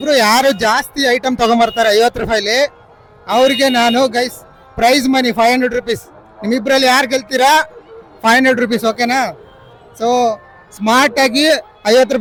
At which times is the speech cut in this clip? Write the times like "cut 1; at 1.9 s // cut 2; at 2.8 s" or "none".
none